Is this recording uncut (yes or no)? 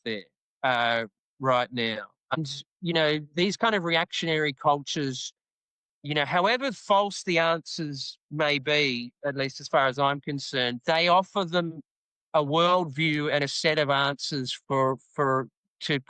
no